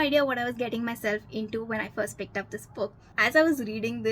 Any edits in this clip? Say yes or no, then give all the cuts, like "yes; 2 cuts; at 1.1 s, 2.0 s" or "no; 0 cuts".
yes; 1 cut; at 3.0 s